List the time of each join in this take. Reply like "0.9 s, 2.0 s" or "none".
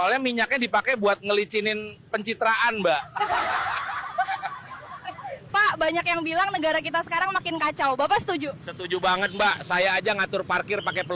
5.3 s